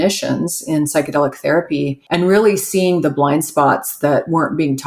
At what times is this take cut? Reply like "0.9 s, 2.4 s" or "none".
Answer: 2.0 s

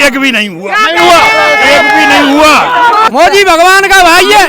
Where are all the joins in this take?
3.0 s

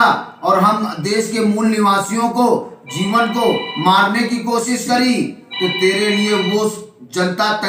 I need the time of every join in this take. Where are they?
none

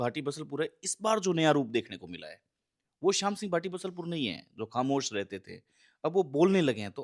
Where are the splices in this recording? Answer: none

